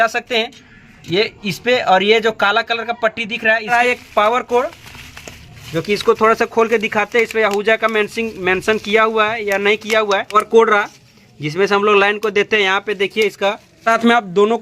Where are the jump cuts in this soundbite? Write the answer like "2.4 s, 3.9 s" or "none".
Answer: 3.7 s, 10.3 s, 13.8 s